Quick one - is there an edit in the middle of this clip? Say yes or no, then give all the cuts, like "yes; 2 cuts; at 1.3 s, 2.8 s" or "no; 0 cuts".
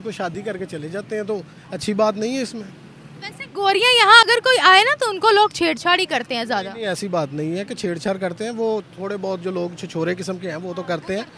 no; 0 cuts